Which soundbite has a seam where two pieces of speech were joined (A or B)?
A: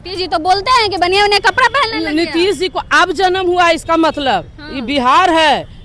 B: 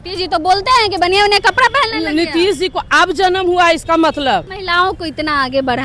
B